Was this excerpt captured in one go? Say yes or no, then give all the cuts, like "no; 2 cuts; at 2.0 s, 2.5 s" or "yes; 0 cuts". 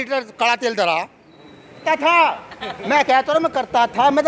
no; 1 cut; at 1.8 s